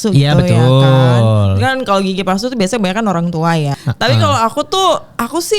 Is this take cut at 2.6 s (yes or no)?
no